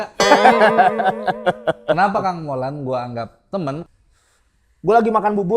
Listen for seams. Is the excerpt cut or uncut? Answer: cut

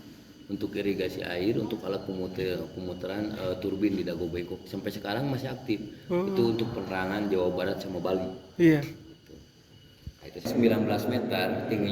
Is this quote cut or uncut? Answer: cut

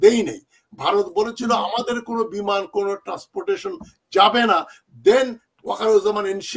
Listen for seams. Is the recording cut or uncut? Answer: uncut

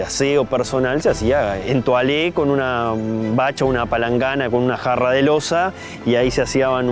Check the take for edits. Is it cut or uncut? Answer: cut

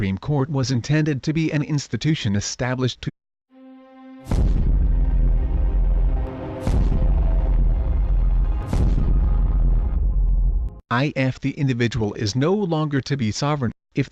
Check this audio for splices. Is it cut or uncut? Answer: uncut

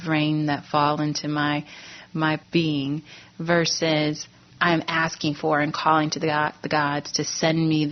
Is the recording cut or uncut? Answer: cut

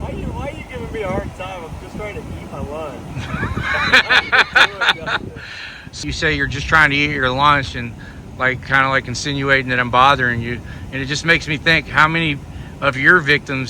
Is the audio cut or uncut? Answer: cut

